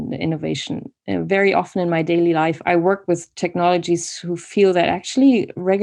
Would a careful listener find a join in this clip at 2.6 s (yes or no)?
yes